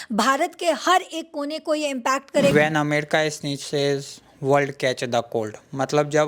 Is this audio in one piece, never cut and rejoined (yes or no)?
no